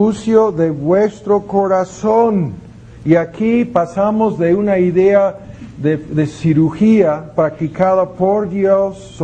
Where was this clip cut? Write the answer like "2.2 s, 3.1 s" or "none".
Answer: 3.5 s